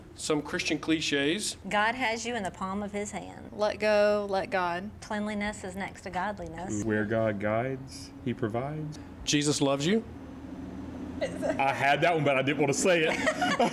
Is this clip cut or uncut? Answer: cut